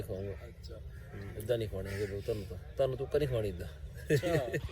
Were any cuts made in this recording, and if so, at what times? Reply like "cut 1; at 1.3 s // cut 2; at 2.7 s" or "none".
none